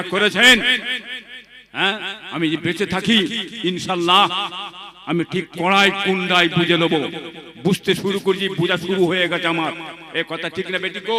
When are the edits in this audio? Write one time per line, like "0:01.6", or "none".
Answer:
none